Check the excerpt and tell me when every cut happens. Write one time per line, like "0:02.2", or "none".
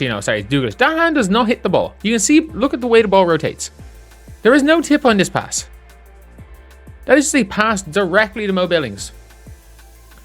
none